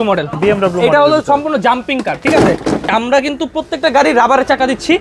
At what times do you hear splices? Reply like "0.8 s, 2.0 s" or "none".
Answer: 2.9 s